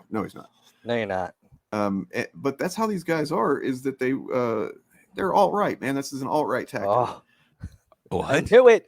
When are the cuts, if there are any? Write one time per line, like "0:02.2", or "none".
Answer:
0:01.5